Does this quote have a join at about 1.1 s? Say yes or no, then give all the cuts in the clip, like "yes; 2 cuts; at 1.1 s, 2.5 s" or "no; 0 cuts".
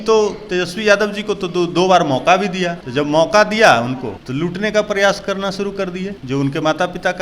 no; 3 cuts; at 2.8 s, 4.1 s, 6.2 s